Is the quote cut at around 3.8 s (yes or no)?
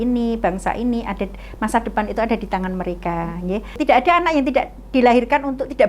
yes